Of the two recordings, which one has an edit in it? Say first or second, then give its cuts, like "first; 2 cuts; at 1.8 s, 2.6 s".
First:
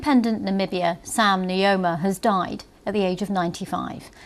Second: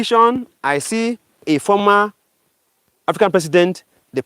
second; 1 cut; at 1.4 s